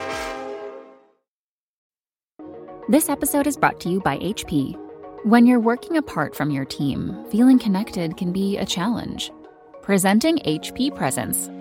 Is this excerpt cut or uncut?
cut